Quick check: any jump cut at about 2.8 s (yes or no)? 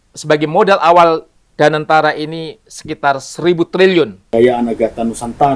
no